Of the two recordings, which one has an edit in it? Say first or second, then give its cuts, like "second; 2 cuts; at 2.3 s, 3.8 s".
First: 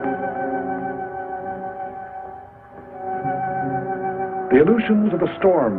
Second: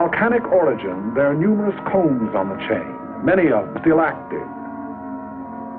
first; 1 cut; at 3.0 s